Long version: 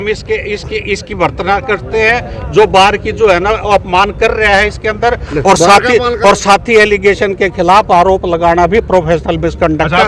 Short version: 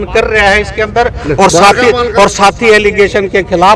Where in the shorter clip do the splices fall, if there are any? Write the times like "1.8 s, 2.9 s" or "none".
none